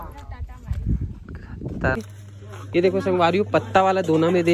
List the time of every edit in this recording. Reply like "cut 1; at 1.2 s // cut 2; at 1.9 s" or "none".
cut 1; at 2.0 s